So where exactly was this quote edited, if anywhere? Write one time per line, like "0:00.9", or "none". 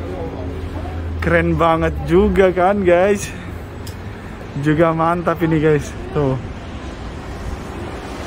none